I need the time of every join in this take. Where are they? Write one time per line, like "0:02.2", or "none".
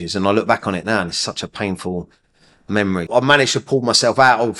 0:03.1

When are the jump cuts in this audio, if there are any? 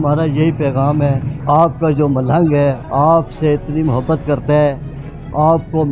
0:01.3
0:02.8

